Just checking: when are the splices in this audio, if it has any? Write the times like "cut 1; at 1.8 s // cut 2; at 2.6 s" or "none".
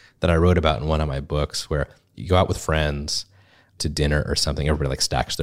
cut 1; at 2.0 s // cut 2; at 3.8 s